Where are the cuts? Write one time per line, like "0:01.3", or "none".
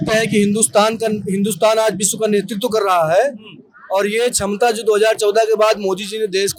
none